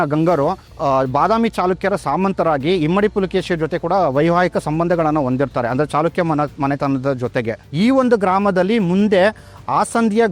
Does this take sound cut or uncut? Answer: cut